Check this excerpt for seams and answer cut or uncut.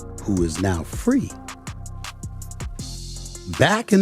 cut